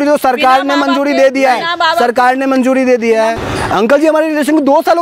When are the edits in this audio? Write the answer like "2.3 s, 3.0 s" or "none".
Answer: 3.4 s